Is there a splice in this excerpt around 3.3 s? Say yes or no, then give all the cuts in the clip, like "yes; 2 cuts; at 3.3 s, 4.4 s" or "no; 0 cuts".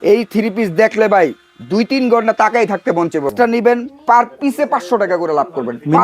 yes; 1 cut; at 3.3 s